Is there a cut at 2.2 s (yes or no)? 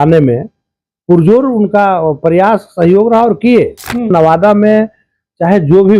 no